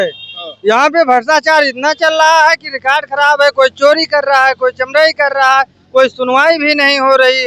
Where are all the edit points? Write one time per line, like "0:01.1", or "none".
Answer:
none